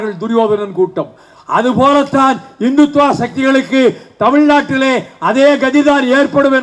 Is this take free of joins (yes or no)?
yes